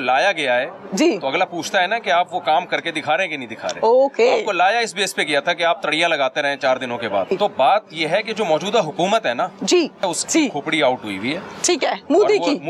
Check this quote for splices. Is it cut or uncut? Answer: cut